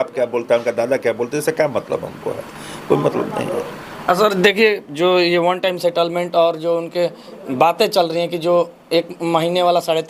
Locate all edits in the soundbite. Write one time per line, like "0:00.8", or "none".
none